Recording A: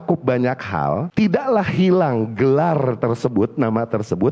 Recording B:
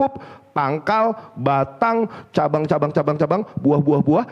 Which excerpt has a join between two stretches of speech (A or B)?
A